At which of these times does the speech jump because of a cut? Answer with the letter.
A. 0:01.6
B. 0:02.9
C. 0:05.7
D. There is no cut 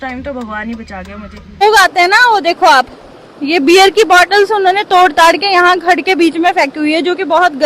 A